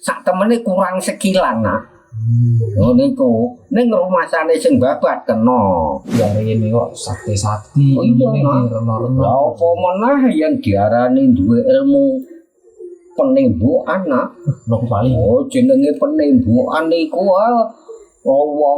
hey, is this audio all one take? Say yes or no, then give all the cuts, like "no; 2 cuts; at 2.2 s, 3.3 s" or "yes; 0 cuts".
no; 1 cut; at 6.0 s